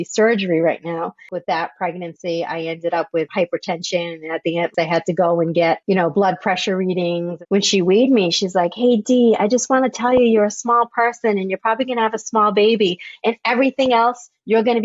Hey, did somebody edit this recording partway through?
yes; 4 cuts; at 1.2 s, 3.3 s, 4.7 s, 7.3 s

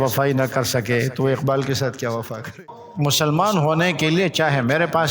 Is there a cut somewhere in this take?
yes; 1 cut; at 2.5 s

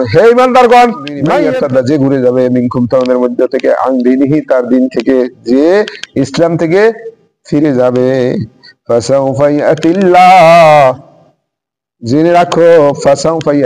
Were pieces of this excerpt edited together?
yes; 1 cut; at 1.3 s

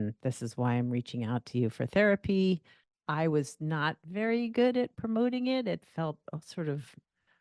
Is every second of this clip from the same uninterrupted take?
yes; 0 cuts

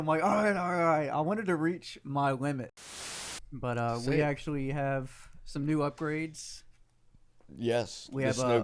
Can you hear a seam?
yes; 1 cut; at 3.1 s

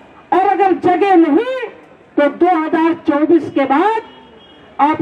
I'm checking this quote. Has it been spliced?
no; 0 cuts

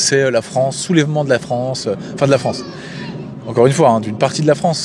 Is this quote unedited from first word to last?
yes; 0 cuts

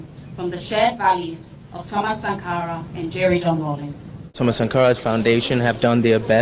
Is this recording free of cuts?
no; 1 cut; at 4.3 s

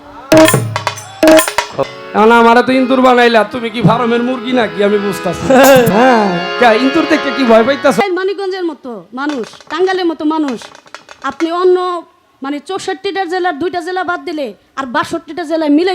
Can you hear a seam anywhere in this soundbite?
yes; 3 cuts; at 1.9 s, 5.9 s, 8.0 s

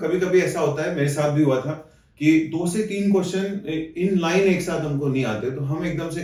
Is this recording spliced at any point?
no; 0 cuts

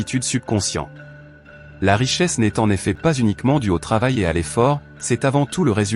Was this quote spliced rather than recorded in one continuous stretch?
no; 0 cuts

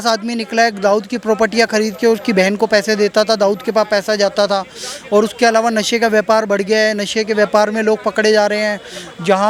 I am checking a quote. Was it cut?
no; 0 cuts

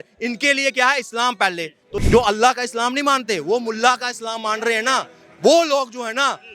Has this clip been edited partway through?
yes; 1 cut; at 1.9 s

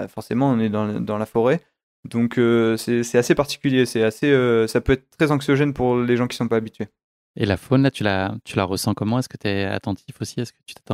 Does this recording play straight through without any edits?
yes; 0 cuts

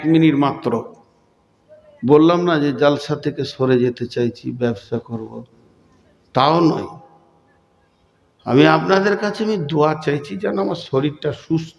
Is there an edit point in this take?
no; 0 cuts

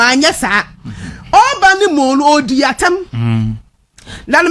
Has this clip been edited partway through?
no; 0 cuts

